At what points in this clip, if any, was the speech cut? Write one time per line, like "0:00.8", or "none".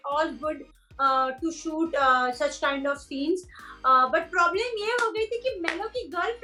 none